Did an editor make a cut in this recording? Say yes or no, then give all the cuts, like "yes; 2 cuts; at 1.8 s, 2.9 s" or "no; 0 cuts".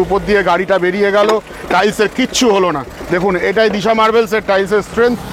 no; 0 cuts